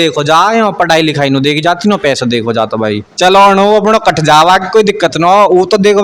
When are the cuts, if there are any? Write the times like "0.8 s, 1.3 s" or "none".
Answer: 3.1 s